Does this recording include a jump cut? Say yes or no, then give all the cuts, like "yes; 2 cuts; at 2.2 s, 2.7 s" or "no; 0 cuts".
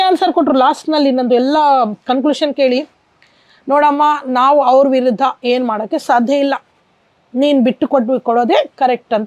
no; 0 cuts